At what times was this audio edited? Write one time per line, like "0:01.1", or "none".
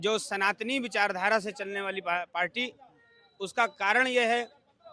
none